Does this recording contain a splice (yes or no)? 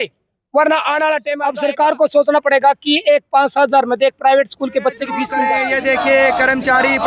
yes